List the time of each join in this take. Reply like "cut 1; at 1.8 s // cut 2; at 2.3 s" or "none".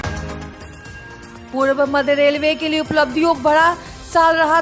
none